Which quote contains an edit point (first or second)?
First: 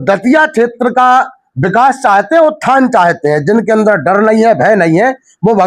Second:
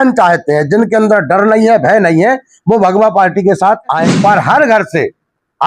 second